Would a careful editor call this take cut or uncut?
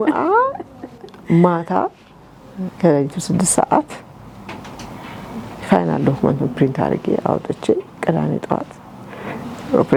uncut